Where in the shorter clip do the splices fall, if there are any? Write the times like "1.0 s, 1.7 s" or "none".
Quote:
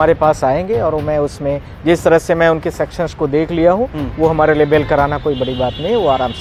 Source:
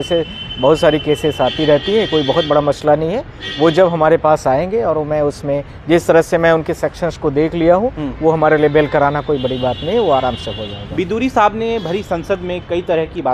none

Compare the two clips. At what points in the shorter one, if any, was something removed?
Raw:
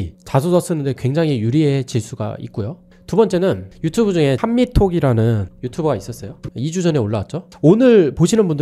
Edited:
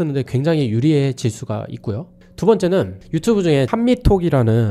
none

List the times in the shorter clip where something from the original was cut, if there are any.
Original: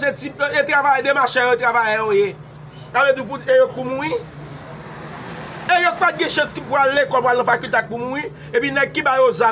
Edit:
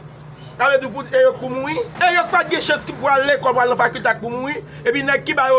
1.9 s

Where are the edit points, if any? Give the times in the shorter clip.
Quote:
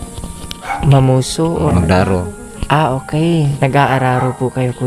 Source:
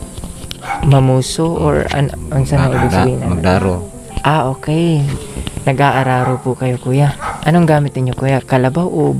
1.7 s, 3.5 s

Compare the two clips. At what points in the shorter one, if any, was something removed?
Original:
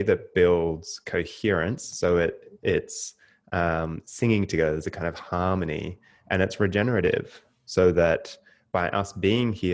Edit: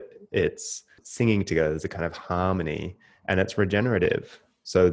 1.0 s

